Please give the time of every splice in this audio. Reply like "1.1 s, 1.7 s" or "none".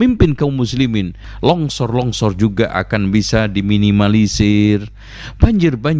1.2 s